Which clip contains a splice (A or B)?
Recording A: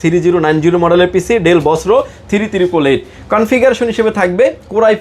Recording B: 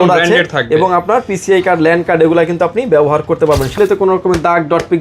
B